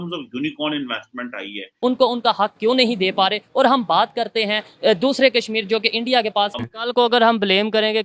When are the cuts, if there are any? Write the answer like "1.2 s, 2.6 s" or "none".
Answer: 1.7 s, 6.5 s